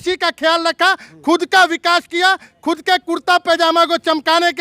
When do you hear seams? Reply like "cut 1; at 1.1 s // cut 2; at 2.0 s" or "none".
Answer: none